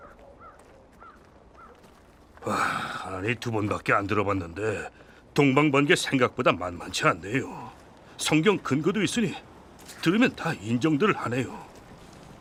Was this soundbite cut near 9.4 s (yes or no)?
no